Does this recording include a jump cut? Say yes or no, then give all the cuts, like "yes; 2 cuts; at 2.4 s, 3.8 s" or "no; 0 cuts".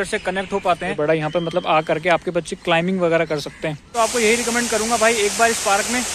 yes; 2 cuts; at 1.0 s, 3.9 s